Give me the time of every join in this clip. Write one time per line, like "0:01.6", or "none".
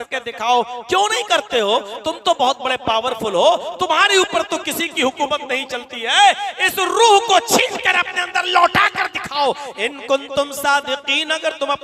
none